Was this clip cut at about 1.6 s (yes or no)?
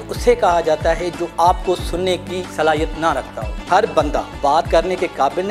no